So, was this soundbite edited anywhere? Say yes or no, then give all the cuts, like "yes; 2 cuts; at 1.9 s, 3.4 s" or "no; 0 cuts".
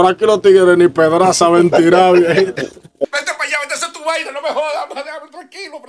no; 0 cuts